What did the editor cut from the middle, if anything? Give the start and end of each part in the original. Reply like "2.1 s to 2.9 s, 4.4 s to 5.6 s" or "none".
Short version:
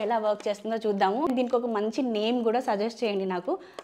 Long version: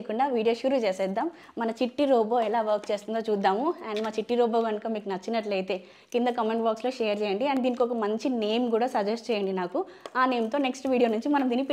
3.7 s to 7.6 s